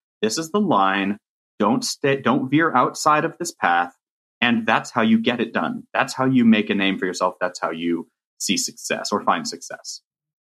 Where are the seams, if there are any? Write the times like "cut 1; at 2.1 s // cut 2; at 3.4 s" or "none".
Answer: none